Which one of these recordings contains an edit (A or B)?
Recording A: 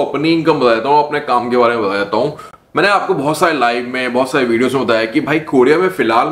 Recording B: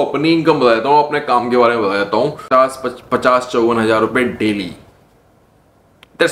B